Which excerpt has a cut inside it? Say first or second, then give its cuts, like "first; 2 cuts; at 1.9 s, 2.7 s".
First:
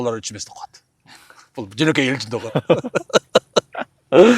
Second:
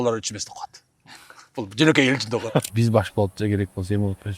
second; 1 cut; at 2.6 s